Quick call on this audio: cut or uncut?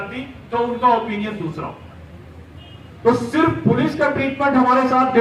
uncut